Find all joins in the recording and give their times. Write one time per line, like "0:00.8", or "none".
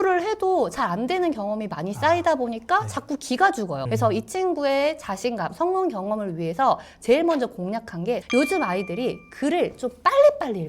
0:03.8
0:08.2